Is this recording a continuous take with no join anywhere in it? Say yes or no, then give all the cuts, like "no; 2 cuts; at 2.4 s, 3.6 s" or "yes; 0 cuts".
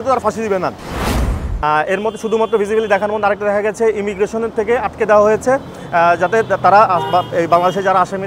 no; 1 cut; at 1.3 s